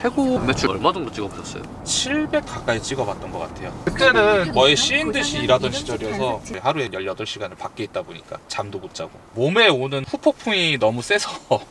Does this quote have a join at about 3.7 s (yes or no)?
yes